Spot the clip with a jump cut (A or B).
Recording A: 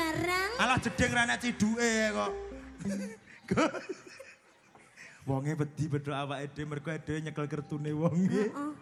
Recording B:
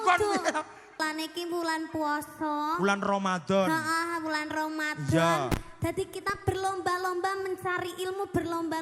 B